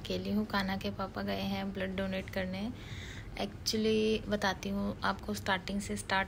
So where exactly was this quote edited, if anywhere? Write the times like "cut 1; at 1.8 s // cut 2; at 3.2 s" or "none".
none